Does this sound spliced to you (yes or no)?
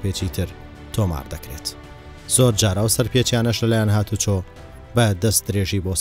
no